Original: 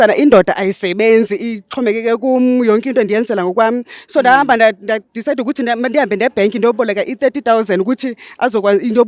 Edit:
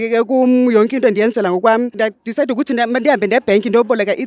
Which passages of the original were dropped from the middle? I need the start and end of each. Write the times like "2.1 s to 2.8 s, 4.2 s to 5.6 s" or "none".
3.9 s to 4.8 s